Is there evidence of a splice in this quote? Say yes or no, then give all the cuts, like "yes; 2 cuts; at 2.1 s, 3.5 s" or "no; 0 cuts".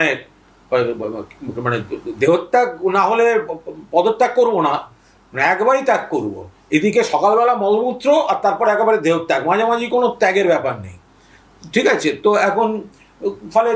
no; 0 cuts